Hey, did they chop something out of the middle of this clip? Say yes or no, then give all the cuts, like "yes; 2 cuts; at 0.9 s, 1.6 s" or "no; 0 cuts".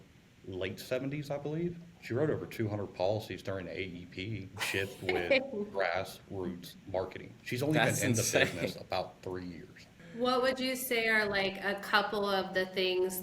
yes; 4 cuts; at 1.9 s, 4.5 s, 7.3 s, 10.0 s